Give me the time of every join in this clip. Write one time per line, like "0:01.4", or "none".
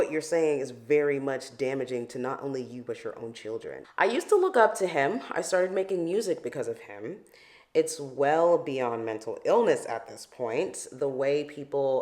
0:03.8